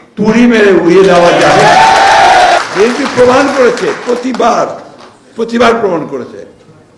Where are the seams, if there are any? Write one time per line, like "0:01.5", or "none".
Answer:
0:02.6